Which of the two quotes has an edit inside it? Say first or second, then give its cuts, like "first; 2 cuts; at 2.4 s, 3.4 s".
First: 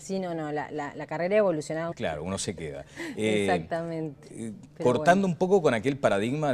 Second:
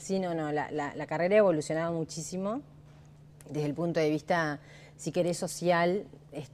second; 1 cut; at 1.9 s